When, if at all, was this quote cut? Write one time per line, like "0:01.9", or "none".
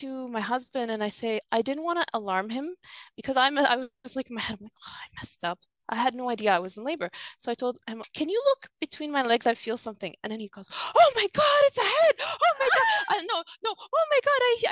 0:01.4
0:07.9